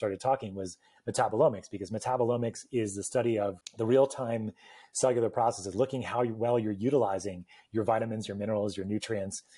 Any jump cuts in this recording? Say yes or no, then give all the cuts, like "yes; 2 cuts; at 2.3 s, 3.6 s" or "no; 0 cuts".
yes; 1 cut; at 3.6 s